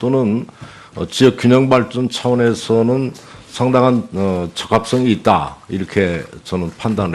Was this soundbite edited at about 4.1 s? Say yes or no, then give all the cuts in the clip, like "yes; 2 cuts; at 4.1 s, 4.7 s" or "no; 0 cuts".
yes; 1 cut; at 4.1 s